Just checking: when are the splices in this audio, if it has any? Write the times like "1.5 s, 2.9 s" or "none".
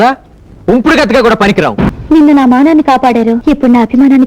1.9 s, 3.4 s